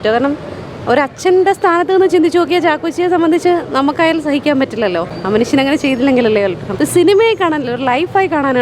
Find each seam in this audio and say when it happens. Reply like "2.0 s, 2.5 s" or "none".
5.1 s, 6.6 s